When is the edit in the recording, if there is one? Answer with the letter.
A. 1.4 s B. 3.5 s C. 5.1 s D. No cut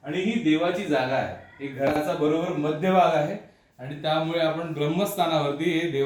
D